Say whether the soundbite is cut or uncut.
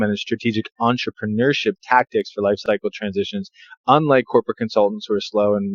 cut